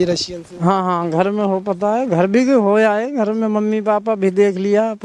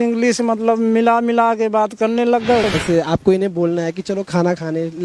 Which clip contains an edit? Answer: second; 1 cut; at 2.7 s

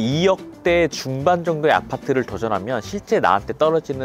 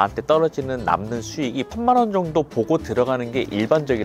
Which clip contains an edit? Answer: second; 1 cut; at 1.7 s

